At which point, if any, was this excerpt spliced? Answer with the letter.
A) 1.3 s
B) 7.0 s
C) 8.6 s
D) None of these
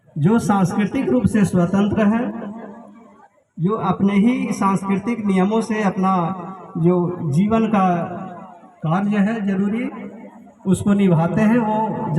D